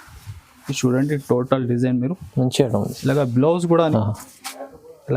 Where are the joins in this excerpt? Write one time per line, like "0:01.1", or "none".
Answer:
0:03.9